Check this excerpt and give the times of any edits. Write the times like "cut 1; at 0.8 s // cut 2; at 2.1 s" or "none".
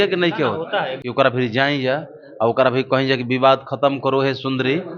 cut 1; at 1.0 s